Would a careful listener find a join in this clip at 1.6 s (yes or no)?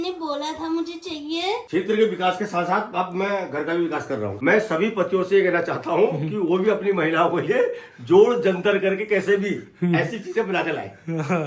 yes